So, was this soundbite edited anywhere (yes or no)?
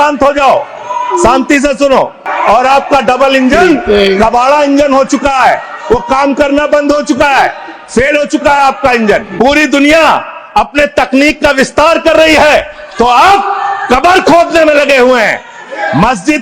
yes